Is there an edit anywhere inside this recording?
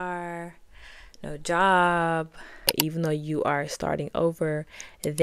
yes; 1 cut; at 2.7 s

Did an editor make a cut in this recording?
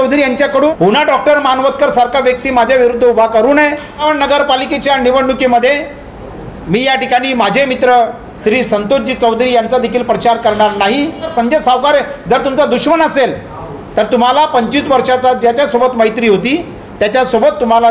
yes; 3 cuts; at 0.7 s, 4.0 s, 11.3 s

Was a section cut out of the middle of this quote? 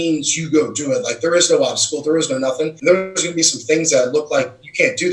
yes; 1 cut; at 2.7 s

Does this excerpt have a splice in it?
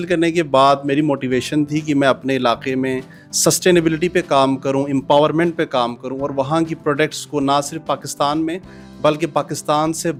no; 0 cuts

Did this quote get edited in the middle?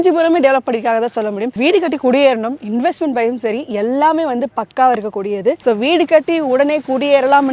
yes; 2 cuts; at 1.5 s, 5.6 s

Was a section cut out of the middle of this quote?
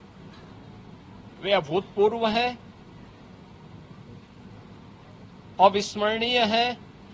no; 0 cuts

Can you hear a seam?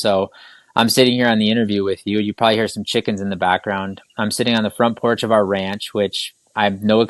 no; 0 cuts

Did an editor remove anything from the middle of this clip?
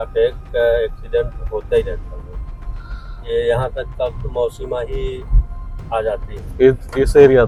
no; 0 cuts

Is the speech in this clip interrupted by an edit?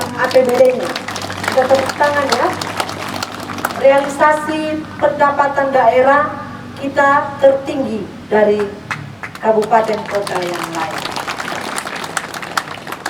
no; 0 cuts

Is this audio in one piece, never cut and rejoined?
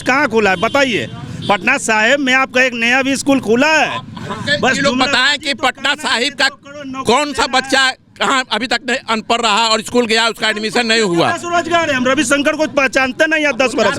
yes; 0 cuts

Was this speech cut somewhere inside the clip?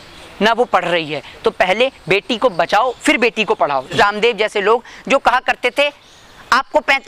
yes; 1 cut; at 3.9 s

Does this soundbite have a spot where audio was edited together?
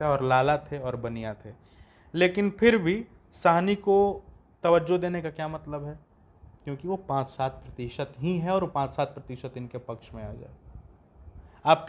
no; 0 cuts

